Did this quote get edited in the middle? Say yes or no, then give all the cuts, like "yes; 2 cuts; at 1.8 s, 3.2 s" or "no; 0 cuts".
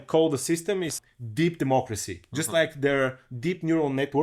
no; 0 cuts